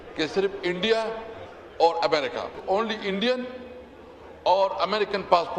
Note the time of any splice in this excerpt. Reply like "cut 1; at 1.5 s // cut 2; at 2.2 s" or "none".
none